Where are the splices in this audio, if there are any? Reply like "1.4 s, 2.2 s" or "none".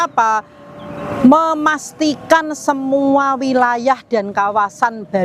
none